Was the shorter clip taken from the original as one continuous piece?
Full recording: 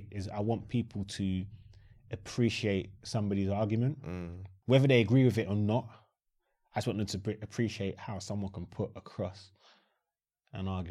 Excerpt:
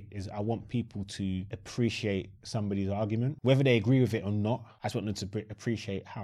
no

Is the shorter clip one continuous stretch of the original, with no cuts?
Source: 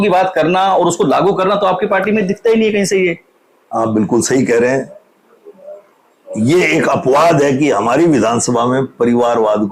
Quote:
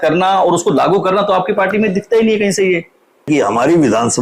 no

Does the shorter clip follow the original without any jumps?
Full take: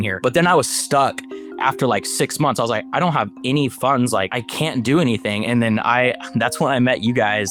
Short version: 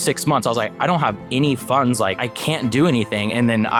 yes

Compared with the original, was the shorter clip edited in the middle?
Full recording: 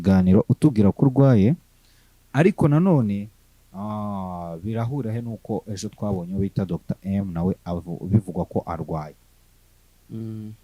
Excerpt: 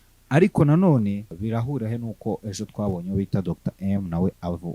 yes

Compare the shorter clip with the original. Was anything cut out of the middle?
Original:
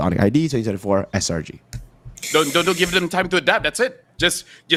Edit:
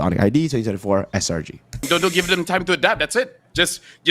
yes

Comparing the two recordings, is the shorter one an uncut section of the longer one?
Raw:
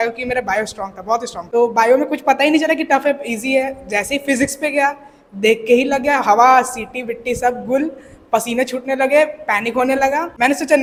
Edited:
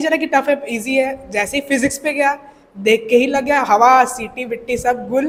yes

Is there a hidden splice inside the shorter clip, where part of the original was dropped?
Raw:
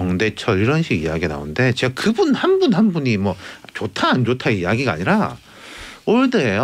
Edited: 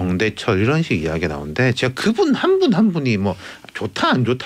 no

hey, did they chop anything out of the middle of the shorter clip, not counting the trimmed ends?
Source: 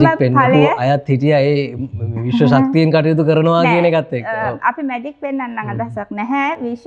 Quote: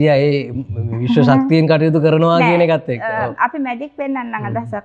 no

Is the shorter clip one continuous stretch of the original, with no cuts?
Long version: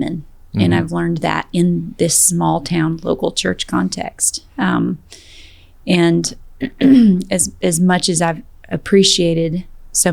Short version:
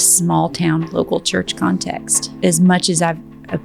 no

